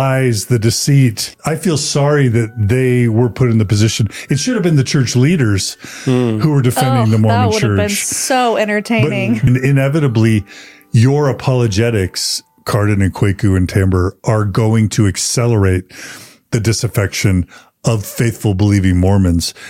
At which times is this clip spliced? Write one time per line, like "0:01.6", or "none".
0:01.3
0:09.4